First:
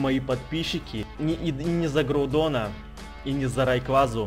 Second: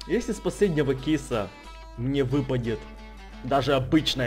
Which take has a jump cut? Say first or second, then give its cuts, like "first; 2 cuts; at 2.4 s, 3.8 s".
first; 1 cut; at 1.0 s